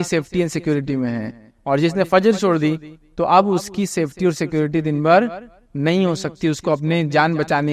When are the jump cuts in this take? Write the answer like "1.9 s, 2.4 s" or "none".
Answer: none